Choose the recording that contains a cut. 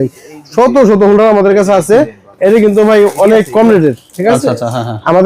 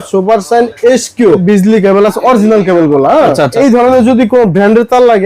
second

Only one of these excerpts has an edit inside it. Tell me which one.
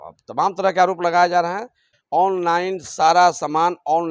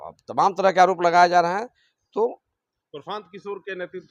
first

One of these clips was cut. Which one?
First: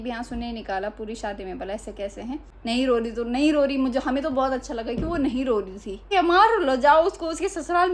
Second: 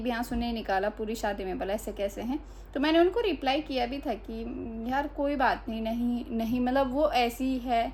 first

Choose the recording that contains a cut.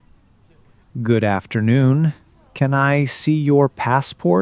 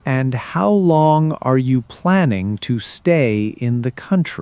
first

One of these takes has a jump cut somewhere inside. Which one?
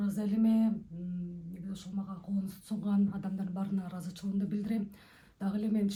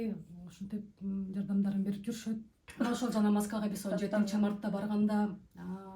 second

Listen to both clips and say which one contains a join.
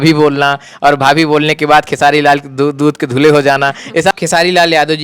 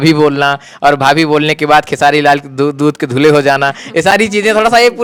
first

